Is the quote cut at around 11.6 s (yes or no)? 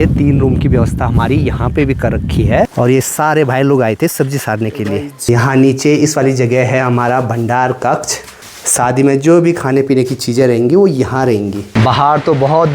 yes